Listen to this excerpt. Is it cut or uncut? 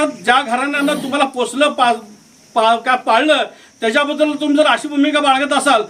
uncut